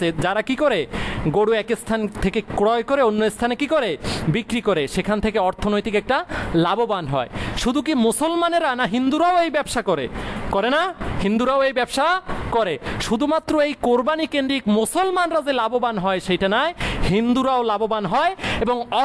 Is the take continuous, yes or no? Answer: yes